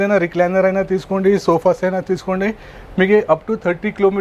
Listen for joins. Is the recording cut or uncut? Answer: uncut